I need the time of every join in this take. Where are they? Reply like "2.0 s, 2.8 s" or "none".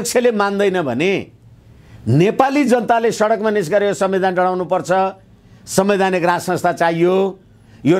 none

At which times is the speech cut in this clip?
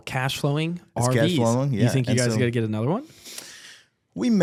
none

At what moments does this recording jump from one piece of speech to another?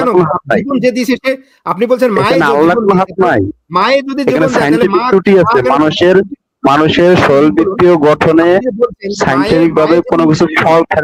none

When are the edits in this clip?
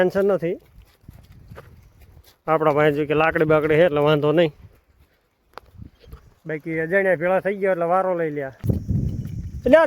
8.6 s

